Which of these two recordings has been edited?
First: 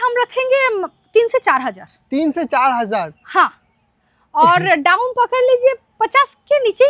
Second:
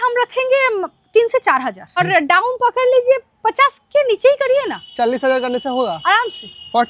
second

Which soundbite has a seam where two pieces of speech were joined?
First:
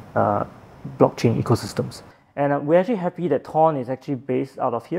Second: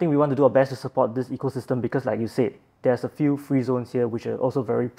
first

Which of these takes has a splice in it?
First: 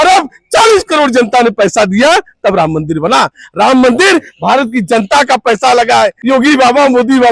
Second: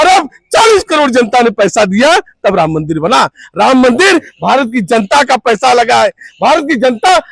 first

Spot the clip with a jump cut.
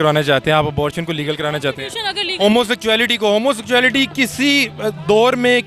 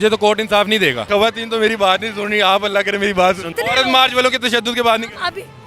second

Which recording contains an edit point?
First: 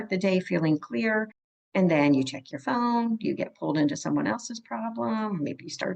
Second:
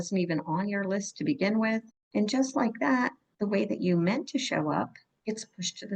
second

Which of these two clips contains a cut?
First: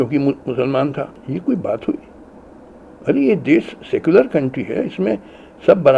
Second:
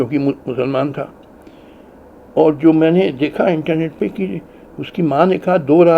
first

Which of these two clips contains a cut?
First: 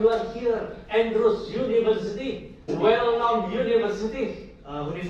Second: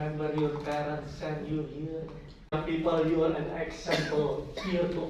second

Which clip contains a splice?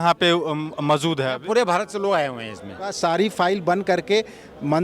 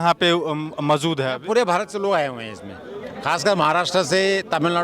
first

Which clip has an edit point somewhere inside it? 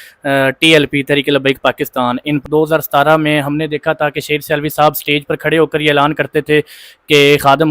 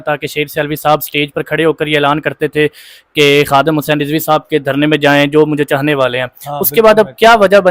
first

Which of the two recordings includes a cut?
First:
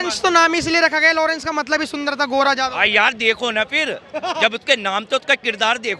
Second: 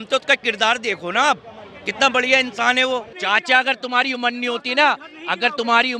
second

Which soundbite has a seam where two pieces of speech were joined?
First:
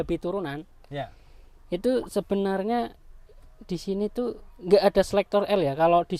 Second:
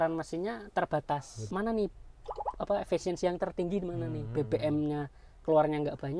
second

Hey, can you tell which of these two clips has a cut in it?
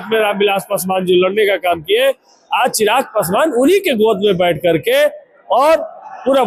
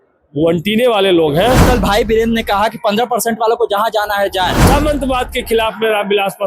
second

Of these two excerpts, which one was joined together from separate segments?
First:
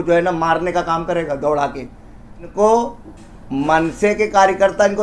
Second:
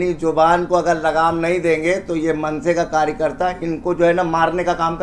first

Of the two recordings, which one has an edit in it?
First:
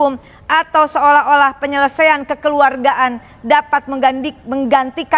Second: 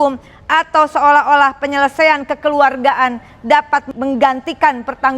second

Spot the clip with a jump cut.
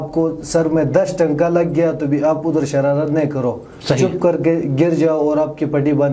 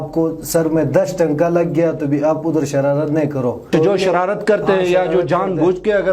second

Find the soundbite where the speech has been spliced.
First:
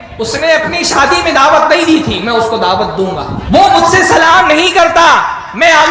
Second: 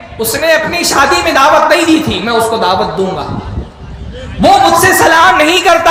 first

